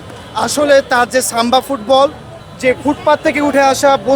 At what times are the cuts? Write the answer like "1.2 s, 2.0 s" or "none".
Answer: none